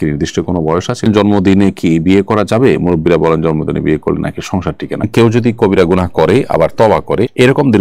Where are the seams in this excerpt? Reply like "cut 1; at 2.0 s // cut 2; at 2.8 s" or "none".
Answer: cut 1; at 1.1 s // cut 2; at 5.1 s